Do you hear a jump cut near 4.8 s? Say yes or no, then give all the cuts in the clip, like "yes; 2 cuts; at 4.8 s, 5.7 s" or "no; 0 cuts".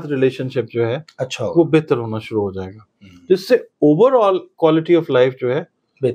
no; 0 cuts